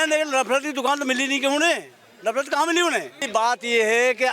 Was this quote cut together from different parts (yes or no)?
yes